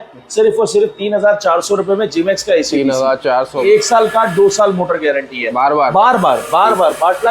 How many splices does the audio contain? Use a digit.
2